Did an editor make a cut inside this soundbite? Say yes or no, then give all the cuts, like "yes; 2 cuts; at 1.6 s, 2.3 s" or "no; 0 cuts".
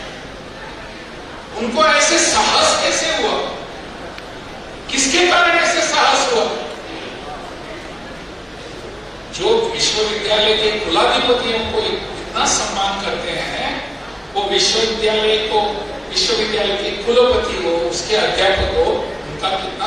no; 0 cuts